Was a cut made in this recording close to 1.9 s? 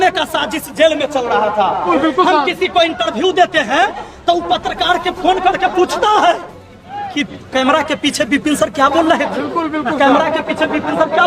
yes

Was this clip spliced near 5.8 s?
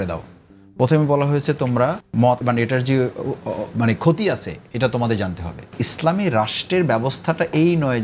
yes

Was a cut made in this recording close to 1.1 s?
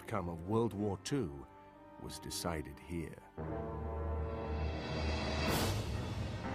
no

